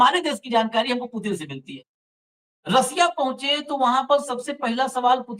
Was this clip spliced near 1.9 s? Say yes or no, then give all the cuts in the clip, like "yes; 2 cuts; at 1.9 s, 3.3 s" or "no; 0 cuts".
yes; 1 cut; at 1.9 s